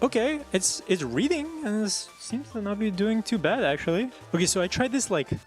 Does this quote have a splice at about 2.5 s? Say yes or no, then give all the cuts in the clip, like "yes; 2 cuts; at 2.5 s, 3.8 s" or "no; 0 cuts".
no; 1 cut; at 4.2 s